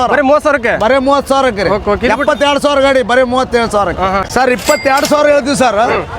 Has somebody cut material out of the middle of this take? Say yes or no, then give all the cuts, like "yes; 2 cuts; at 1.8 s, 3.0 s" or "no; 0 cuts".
yes; 1 cut; at 4.2 s